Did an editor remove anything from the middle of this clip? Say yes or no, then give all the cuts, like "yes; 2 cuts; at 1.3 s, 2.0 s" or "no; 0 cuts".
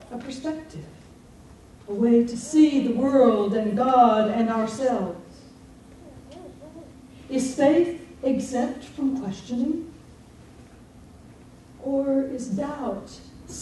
yes; 1 cut; at 2.4 s